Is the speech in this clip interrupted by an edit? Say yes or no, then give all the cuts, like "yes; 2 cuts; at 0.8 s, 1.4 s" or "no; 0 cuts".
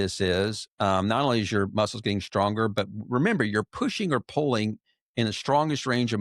no; 0 cuts